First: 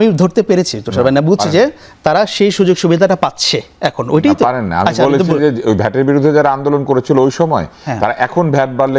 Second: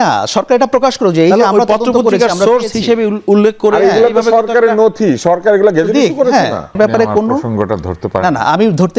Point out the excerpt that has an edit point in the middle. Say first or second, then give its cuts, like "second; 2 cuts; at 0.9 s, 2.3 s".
second; 1 cut; at 6.7 s